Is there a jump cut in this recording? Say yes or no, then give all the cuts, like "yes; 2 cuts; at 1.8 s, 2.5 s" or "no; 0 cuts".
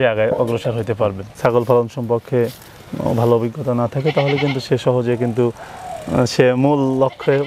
no; 0 cuts